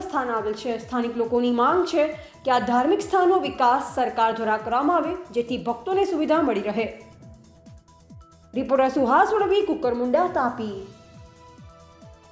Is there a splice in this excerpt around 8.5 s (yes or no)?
yes